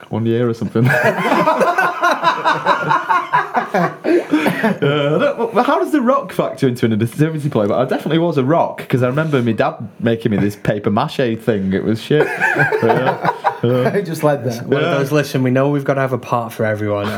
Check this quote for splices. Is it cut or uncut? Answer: uncut